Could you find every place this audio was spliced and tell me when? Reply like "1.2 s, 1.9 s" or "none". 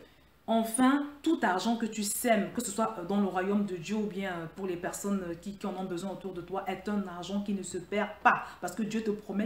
none